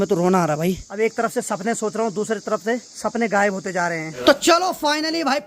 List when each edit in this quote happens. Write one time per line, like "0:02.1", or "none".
0:00.9
0:02.9
0:04.2